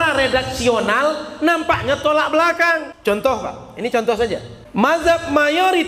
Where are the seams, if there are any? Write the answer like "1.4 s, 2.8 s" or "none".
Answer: 2.9 s, 4.6 s